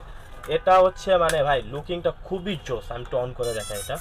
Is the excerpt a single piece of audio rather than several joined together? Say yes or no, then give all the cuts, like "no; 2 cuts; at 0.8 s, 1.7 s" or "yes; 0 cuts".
yes; 0 cuts